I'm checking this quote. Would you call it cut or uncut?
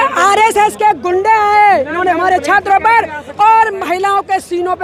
uncut